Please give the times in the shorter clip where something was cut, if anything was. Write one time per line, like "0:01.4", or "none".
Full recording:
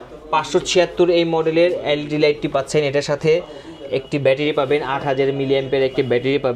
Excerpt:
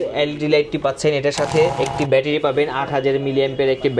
0:01.7